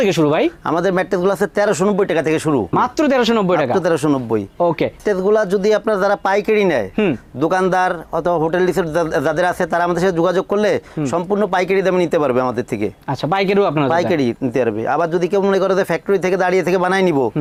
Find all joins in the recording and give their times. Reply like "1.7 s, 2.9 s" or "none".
none